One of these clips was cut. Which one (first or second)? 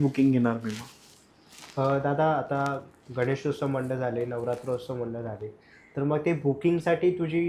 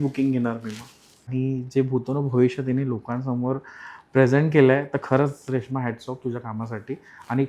second